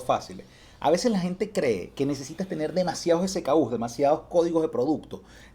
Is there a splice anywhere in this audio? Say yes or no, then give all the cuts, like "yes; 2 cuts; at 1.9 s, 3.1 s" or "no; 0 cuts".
no; 0 cuts